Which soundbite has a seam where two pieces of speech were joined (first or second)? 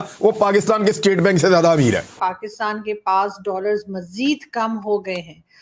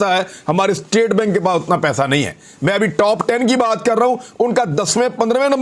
first